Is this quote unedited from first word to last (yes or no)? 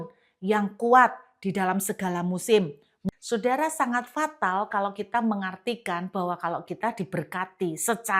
no